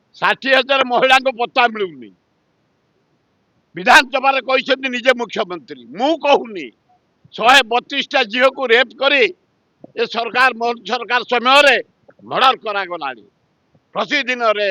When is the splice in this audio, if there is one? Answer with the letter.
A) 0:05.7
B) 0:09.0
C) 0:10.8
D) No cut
D